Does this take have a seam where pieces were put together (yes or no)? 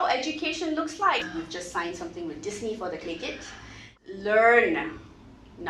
yes